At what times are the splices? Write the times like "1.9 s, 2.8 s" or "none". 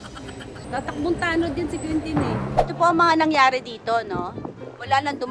2.6 s